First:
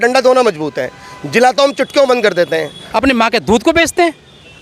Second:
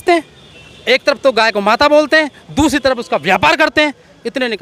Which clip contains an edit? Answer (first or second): first